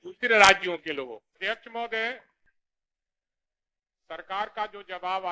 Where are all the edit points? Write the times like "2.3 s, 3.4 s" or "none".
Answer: 1.6 s